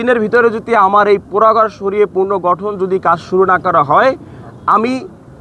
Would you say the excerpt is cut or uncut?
uncut